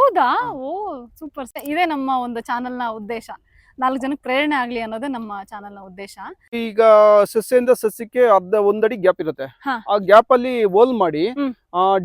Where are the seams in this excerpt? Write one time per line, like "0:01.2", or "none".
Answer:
0:01.6
0:06.5